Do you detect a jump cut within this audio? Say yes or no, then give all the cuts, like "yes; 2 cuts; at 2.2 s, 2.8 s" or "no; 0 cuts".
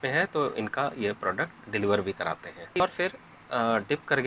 yes; 1 cut; at 2.8 s